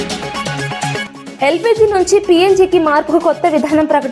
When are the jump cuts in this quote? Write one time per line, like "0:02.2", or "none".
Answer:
0:01.0

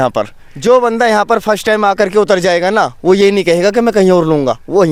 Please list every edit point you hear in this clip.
none

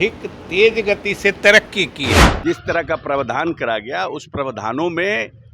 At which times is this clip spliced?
0:02.3

